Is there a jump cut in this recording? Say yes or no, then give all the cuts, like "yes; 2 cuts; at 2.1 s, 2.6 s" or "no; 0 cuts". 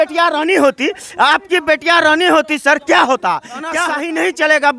yes; 1 cut; at 3.8 s